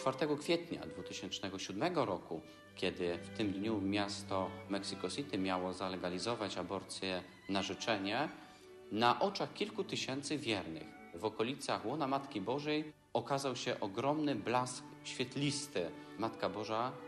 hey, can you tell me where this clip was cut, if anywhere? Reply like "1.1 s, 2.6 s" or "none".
4.7 s

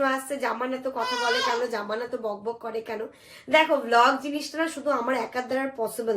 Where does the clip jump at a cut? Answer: none

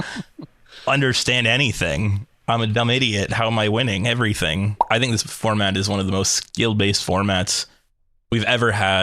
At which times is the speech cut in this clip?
4.8 s

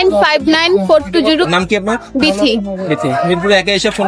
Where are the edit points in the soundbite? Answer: 1.4 s

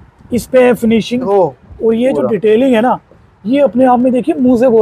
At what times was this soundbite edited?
1.3 s

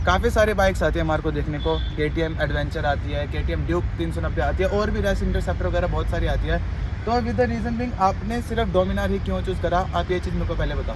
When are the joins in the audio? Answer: none

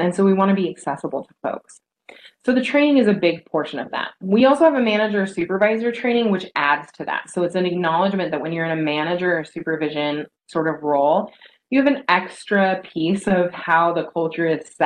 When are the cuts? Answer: none

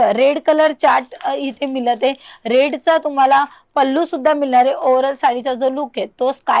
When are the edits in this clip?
none

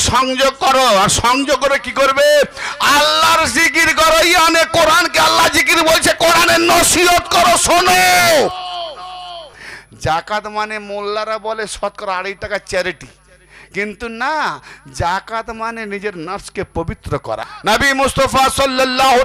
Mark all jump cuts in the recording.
9.6 s, 17.5 s

